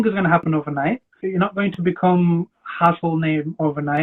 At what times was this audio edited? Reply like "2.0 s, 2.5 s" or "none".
1.2 s

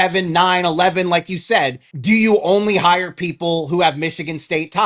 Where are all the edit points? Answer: 1.9 s

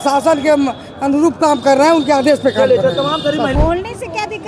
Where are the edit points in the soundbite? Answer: 3.5 s

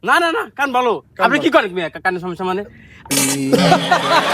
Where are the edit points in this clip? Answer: 3.1 s

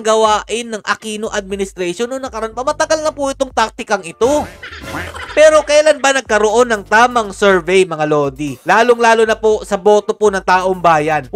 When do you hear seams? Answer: none

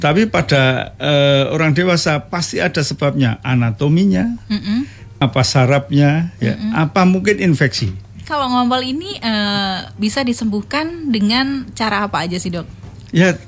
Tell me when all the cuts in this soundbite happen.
8.2 s

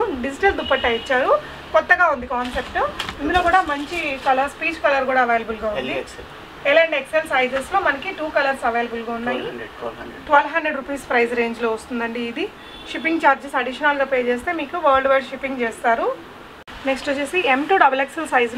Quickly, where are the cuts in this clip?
none

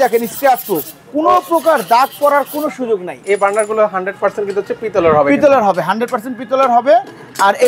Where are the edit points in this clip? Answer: 3.2 s

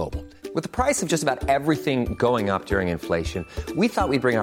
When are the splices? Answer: none

